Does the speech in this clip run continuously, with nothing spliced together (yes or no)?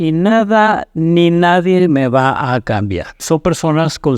no